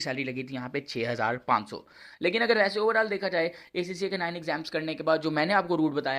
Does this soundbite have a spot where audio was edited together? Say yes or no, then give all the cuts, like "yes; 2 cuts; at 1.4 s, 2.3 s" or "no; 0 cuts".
no; 0 cuts